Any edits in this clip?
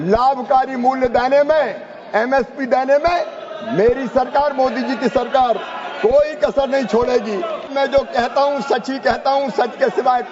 yes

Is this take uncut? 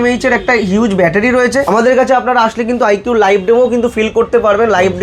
no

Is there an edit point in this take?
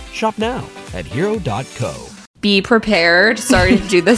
yes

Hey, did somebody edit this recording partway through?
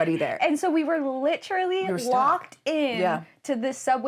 no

